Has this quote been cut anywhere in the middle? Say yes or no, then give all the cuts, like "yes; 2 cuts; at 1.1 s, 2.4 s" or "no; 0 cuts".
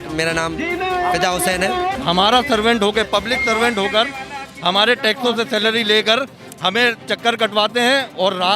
yes; 1 cut; at 1.9 s